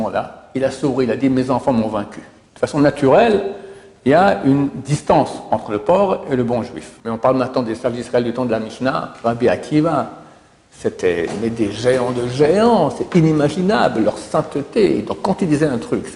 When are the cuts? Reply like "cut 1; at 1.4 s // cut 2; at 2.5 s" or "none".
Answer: cut 1; at 2.4 s // cut 2; at 6.9 s